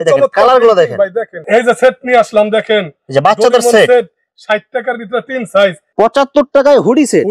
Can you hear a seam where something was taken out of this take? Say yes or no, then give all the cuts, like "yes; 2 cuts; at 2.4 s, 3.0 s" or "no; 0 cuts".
yes; 2 cuts; at 1.3 s, 5.9 s